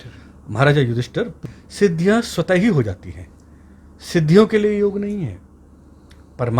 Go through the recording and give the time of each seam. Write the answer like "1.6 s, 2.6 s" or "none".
1.4 s